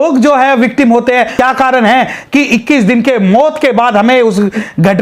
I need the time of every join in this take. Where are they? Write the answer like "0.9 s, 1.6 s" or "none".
1.3 s

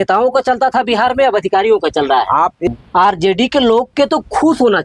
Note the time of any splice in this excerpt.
2.7 s

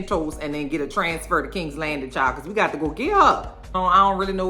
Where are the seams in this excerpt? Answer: 3.6 s

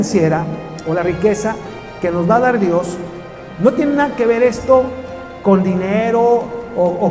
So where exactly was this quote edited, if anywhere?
none

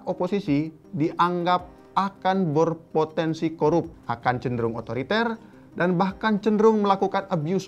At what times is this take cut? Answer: 4.0 s

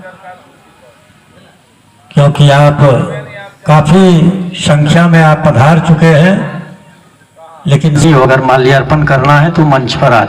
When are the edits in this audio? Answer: none

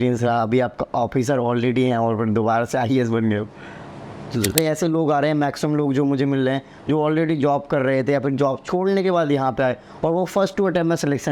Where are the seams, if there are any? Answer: 4.6 s

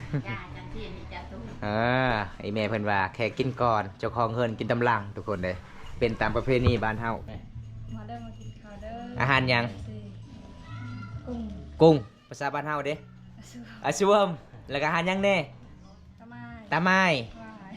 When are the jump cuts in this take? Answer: 7.2 s

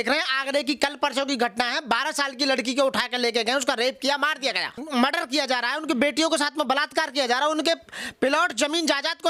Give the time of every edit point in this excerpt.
4.7 s

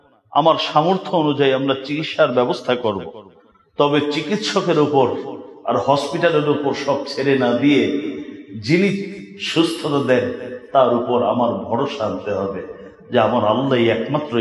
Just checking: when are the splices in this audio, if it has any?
none

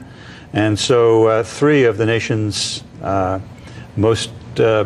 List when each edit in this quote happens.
2.3 s

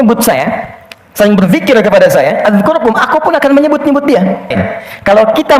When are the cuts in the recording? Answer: 4.5 s

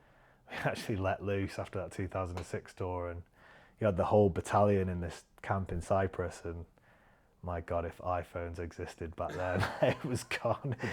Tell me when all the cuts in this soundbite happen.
9.7 s

